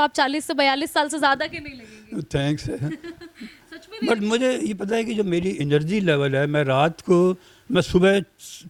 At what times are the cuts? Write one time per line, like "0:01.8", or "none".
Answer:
none